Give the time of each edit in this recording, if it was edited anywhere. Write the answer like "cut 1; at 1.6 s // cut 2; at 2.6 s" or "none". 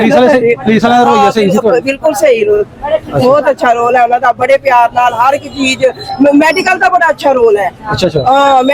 none